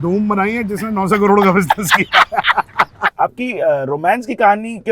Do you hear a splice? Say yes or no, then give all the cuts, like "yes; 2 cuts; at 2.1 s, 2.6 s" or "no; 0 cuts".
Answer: yes; 1 cut; at 3.0 s